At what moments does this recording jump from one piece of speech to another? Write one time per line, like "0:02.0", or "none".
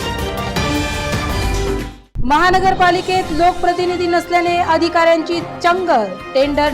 none

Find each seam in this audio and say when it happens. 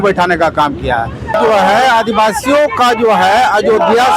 0:01.4

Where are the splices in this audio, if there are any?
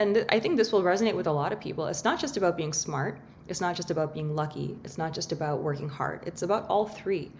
none

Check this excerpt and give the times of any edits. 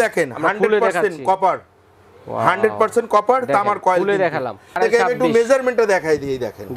0:04.8

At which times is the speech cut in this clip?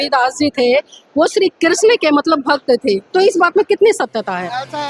none

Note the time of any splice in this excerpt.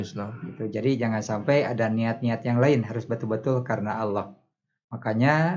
none

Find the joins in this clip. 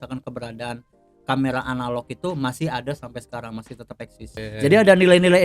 0:04.4

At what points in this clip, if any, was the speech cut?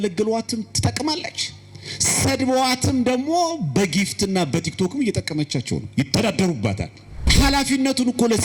0:07.3

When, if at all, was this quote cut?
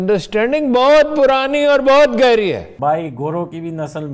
0:02.7

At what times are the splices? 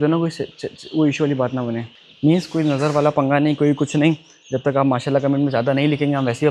none

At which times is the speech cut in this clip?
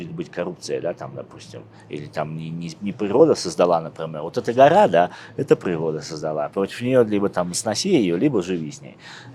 none

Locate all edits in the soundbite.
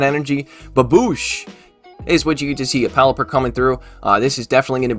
0:01.8

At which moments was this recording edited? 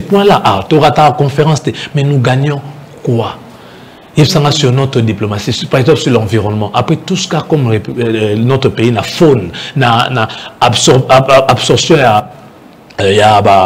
none

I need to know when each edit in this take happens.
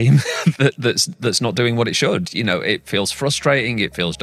none

